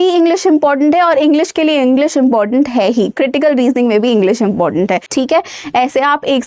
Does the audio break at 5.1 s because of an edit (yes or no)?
yes